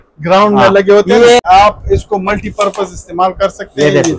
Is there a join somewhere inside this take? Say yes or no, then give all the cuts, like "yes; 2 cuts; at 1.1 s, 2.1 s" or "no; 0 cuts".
yes; 1 cut; at 1.4 s